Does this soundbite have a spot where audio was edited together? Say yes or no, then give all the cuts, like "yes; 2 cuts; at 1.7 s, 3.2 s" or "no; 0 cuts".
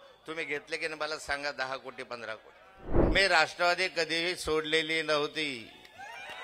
yes; 1 cut; at 2.9 s